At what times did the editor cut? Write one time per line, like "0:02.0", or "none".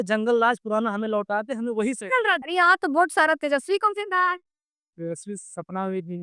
0:02.4